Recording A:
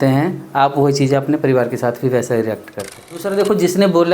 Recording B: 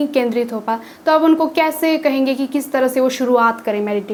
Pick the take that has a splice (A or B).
A